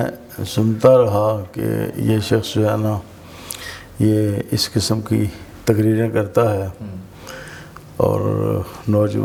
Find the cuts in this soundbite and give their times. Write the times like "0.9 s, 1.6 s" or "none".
none

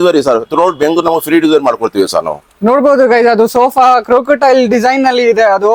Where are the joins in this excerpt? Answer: none

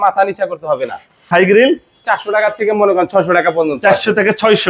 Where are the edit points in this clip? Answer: 1.3 s, 2.0 s

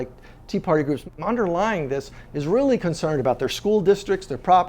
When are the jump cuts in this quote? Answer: 1.0 s

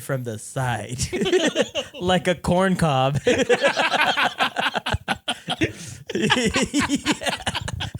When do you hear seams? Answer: 5.6 s

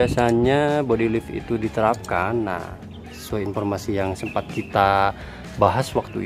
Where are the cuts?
none

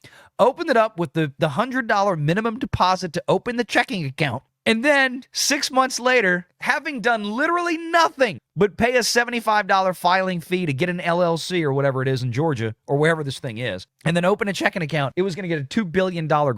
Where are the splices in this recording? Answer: 15.1 s

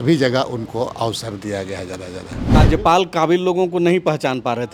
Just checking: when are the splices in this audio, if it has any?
2.5 s

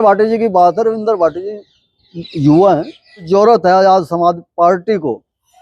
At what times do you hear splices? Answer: 3.3 s

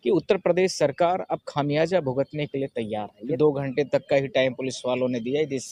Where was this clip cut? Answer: 3.2 s

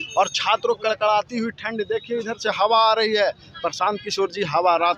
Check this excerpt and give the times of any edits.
none

